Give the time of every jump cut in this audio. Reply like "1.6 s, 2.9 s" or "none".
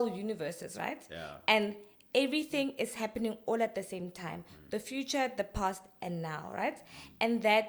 none